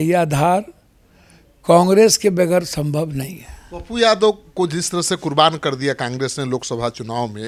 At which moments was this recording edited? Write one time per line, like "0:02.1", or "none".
none